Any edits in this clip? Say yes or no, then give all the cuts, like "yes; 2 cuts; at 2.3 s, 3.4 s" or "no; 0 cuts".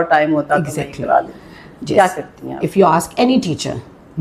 no; 0 cuts